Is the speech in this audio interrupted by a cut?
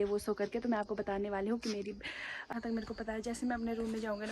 yes; 1 cut; at 2.5 s

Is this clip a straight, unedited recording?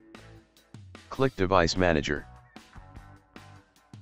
no; 2 cuts; at 1.1 s, 2.2 s

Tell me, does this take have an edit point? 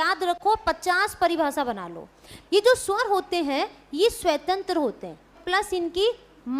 yes; 2 cuts; at 2.3 s, 5.4 s

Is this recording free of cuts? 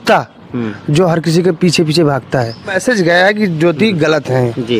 no; 1 cut; at 2.8 s

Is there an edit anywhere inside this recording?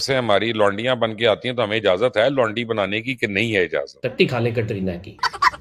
yes; 1 cut; at 4.0 s

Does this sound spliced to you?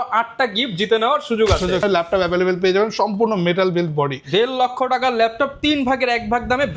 yes; 1 cut; at 1.8 s

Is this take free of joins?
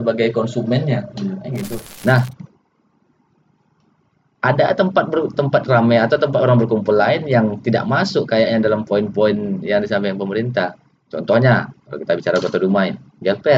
no; 1 cut; at 1.9 s

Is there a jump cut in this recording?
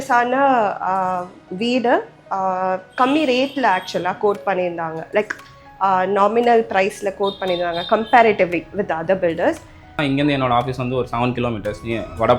yes; 1 cut; at 9.9 s

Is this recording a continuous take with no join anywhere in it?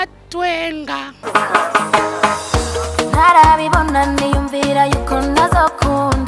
no; 1 cut; at 1.1 s

